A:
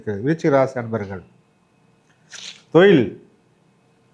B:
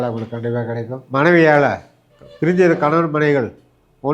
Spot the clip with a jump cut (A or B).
B